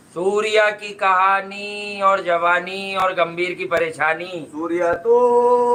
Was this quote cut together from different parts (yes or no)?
no